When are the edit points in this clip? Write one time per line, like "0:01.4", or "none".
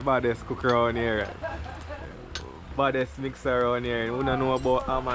none